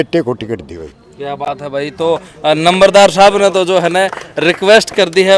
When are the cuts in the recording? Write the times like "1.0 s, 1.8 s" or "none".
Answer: none